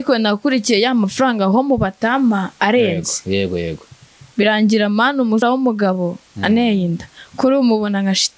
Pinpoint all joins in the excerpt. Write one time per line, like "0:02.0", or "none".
none